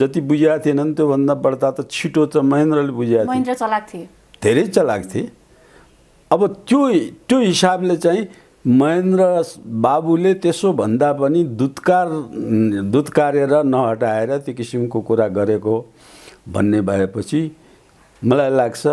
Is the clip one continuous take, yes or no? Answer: yes